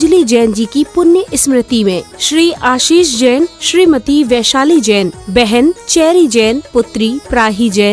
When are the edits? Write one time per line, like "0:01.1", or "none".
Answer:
none